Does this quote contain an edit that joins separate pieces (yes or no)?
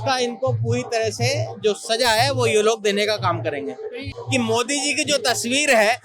yes